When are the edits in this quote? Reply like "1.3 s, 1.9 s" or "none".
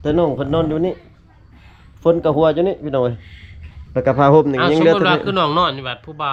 none